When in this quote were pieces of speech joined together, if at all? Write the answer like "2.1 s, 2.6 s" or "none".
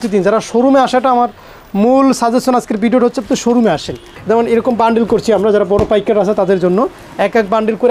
4.1 s